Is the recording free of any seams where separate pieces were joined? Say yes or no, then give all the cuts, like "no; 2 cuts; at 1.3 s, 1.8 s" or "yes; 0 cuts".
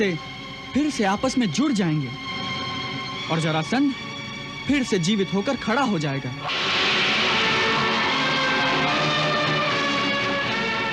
yes; 0 cuts